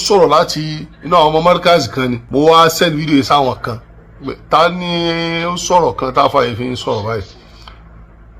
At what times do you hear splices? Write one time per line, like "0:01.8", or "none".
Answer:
0:02.2